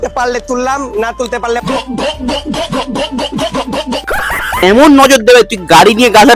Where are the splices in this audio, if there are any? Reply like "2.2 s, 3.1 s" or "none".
4.6 s